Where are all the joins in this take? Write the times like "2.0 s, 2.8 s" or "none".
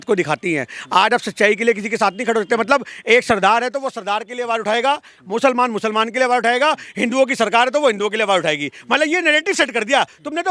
none

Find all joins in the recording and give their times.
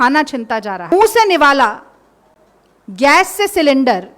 0.9 s

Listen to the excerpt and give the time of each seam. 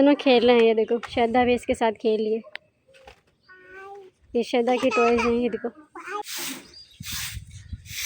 6.2 s

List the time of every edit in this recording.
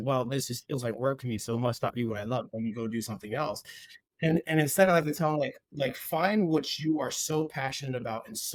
none

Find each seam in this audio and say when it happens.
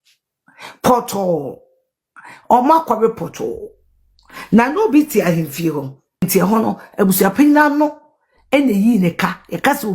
6.3 s

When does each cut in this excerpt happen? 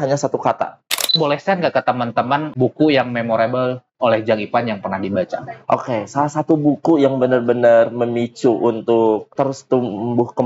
1.1 s, 2.5 s, 3.9 s, 9.3 s

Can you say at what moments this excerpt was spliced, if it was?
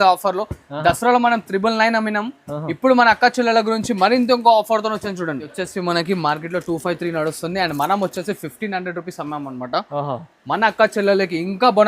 5.5 s

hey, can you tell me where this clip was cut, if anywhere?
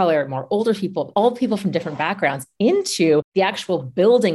3.3 s

